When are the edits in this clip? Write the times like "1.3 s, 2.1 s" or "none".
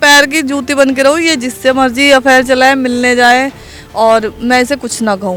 none